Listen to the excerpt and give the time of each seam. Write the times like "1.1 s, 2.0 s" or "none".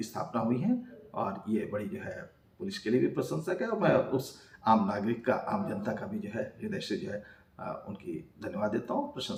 none